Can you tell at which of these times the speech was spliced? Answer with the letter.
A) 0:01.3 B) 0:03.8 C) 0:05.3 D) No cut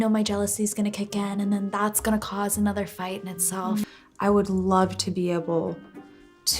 B